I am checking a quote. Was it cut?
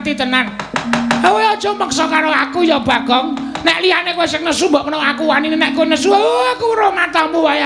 no; 0 cuts

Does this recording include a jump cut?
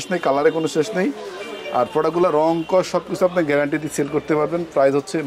no; 0 cuts

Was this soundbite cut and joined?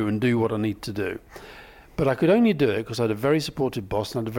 no; 0 cuts

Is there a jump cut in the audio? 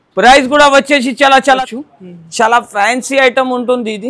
yes; 1 cut; at 1.6 s

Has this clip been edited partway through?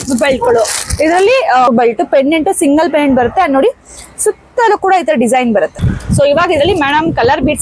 yes; 2 cuts; at 1.7 s, 5.9 s

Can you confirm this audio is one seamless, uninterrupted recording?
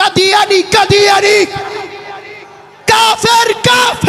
yes; 0 cuts

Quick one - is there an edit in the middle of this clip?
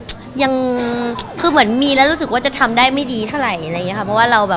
no; 0 cuts

